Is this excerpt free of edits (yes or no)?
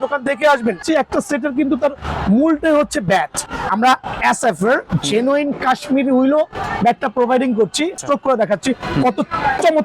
no